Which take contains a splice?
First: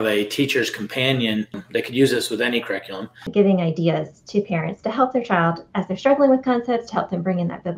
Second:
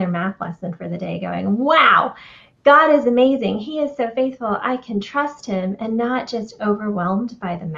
first; 2 cuts; at 1.6 s, 3.2 s

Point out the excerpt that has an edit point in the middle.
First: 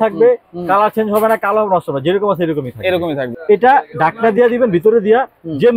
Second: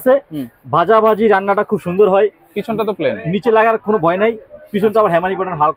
first; 1 cut; at 3.3 s

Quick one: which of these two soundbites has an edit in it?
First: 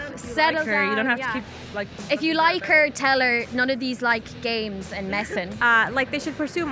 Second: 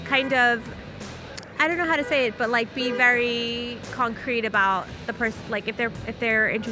first; 1 cut; at 5.5 s

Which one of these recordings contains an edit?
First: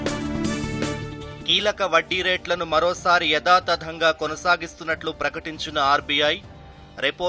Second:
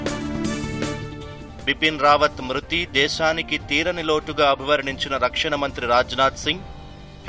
second; 1 cut; at 1.2 s

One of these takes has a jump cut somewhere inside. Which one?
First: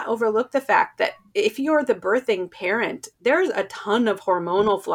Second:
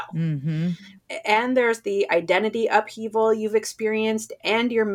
second; 1 cut; at 1.0 s

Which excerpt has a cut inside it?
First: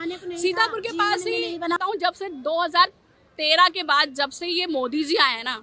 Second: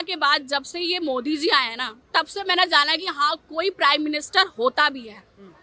first; 1 cut; at 1.8 s

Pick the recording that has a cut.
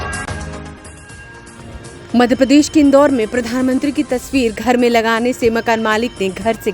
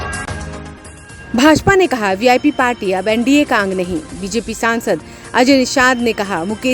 second; 1 cut; at 1.0 s

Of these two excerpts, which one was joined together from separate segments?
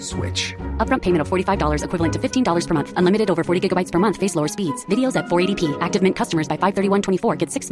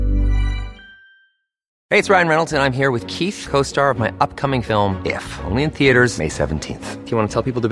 second; 1 cut; at 1.7 s

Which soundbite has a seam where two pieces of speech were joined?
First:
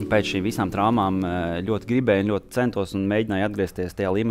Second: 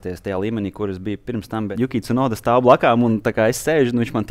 second; 1 cut; at 1.7 s

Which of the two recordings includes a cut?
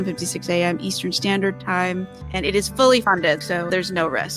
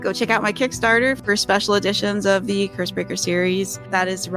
first; 1 cut; at 2.2 s

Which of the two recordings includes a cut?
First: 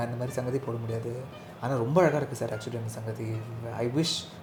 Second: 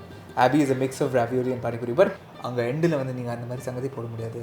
second; 1 cut; at 2.2 s

